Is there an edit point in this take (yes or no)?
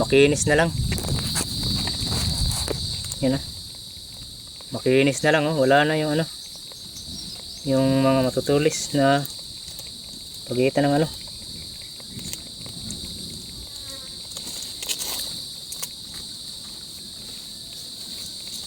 no